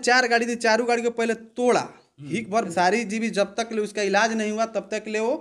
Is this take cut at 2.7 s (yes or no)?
yes